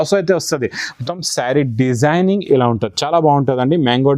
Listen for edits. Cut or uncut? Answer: cut